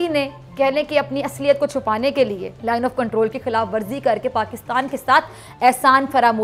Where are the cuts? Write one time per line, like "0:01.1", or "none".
0:02.5